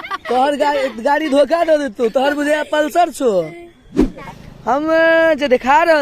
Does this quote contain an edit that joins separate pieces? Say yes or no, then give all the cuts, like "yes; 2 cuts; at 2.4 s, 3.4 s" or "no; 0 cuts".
yes; 1 cut; at 4.3 s